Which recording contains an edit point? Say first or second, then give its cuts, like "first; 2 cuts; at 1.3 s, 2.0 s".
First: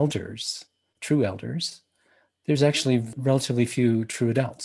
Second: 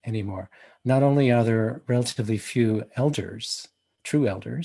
first; 1 cut; at 3.1 s